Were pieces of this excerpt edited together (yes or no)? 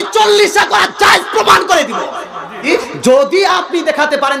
yes